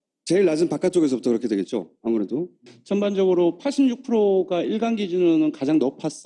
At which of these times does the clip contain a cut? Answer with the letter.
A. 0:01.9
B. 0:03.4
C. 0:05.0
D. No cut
B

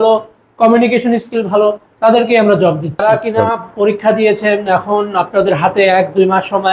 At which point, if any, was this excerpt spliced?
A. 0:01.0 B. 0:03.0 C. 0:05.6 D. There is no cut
B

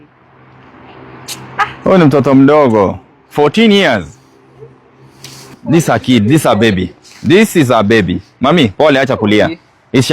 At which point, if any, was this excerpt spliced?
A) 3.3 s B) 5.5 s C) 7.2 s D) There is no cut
B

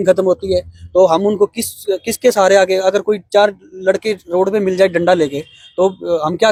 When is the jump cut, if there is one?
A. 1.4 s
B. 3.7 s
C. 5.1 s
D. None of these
D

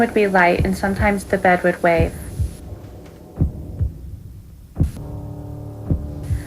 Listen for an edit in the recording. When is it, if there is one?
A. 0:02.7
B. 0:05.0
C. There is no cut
B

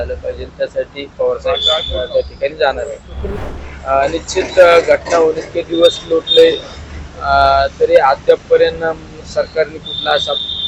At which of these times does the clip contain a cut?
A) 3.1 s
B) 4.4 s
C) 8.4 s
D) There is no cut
A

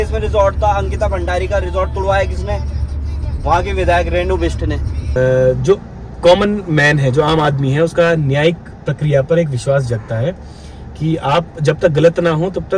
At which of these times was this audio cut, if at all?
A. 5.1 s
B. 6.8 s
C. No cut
A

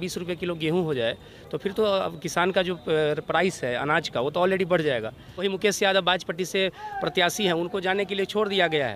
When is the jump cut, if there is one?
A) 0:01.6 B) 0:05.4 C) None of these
B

